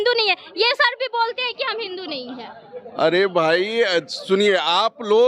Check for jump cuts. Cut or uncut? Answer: uncut